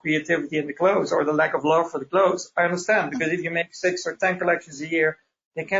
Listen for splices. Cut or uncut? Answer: uncut